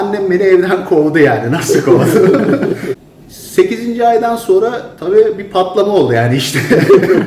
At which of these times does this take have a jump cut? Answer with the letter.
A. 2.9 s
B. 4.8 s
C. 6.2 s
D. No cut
A